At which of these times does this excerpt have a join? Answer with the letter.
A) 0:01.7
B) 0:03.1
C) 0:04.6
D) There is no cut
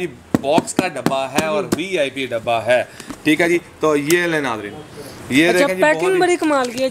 D